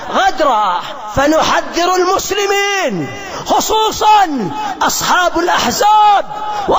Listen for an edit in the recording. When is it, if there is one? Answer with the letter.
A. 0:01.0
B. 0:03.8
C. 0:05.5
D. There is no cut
A